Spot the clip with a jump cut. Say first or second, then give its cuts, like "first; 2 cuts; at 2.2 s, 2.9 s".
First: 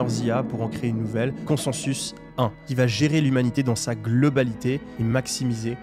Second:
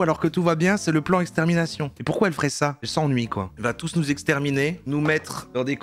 first; 1 cut; at 4.8 s